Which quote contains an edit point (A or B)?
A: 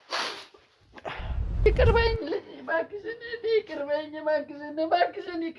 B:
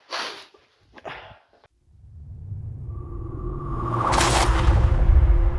A